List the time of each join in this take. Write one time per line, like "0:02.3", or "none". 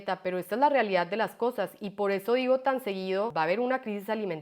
0:03.3